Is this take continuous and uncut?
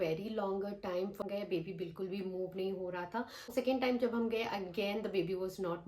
no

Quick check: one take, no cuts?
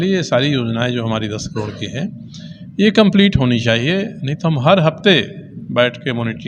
yes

